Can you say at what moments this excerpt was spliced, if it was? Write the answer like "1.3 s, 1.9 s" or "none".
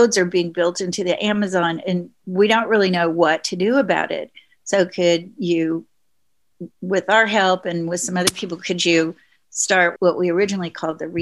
9.9 s